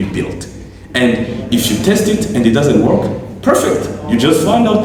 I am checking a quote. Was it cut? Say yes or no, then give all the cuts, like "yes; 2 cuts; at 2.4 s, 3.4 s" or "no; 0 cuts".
no; 0 cuts